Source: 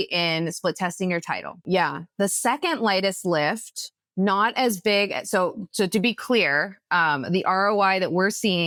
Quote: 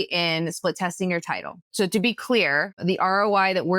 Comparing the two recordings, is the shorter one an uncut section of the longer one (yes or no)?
no